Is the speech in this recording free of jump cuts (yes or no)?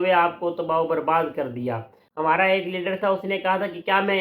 no